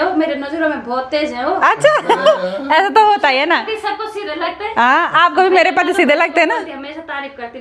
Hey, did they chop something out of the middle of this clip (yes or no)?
no